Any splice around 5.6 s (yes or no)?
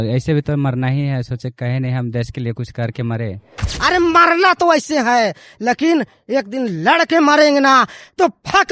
no